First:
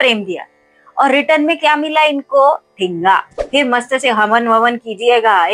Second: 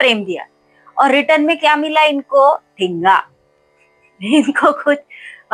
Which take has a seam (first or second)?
first